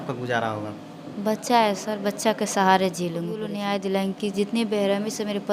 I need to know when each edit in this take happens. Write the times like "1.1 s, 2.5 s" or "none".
3.5 s